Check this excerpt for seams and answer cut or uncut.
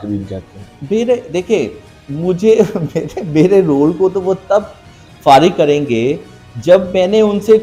uncut